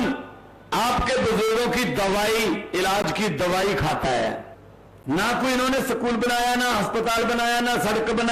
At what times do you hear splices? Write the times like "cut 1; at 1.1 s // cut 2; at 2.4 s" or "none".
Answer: cut 1; at 4.4 s